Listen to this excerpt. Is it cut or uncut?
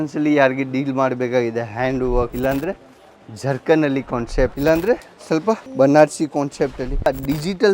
cut